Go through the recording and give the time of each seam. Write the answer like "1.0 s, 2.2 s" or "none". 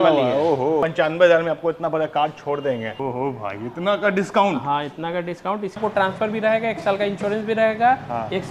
0.8 s, 2.9 s, 5.8 s